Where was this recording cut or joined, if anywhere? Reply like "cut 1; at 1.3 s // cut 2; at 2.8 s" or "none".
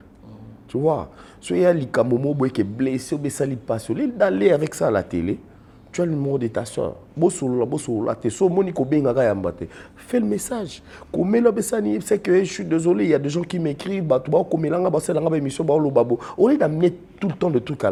none